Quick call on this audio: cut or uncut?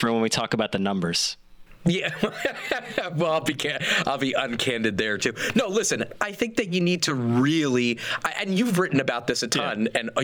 uncut